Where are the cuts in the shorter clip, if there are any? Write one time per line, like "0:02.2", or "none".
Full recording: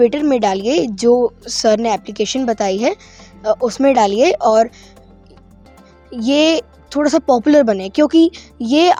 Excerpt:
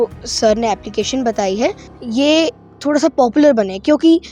0:01.9

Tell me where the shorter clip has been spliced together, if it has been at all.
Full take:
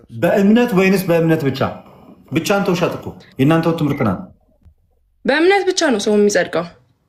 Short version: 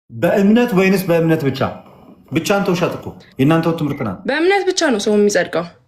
0:04.1

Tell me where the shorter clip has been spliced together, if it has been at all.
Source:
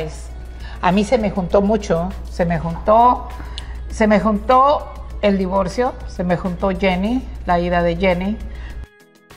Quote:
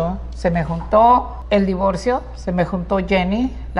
0:01.4

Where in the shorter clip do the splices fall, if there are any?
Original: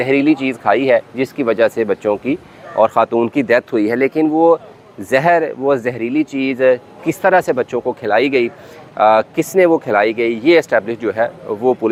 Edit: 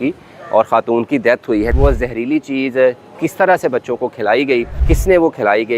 0:01.7
0:04.8

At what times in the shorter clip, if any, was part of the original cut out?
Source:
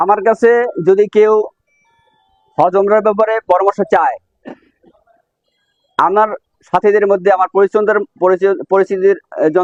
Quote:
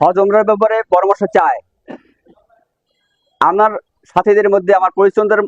none

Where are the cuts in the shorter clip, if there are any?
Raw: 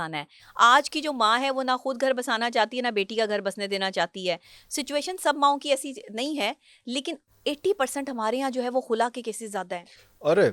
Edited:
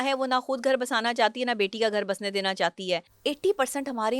0:03.1

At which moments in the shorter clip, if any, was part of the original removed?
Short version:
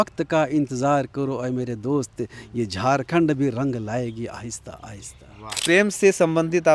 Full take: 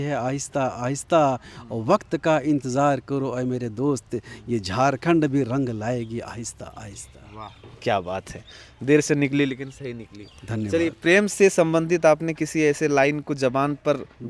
0:05.6

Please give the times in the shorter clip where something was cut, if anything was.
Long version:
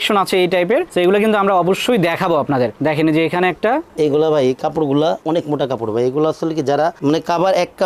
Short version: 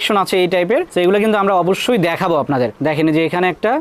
none

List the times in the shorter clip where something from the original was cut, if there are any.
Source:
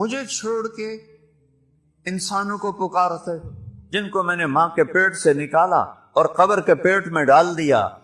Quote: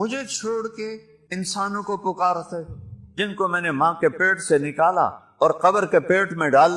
0:01.1

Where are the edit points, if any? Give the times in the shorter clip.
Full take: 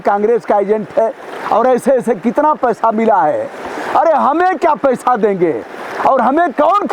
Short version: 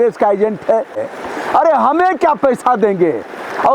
0:01.1

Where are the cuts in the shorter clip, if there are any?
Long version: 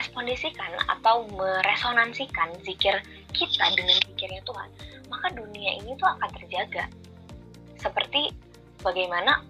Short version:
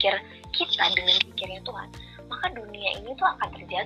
none

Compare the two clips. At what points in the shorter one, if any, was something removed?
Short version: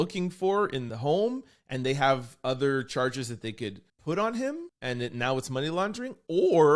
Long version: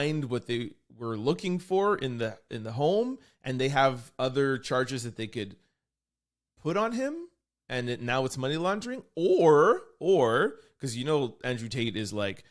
0:00.8
0:03.9
0:04.7

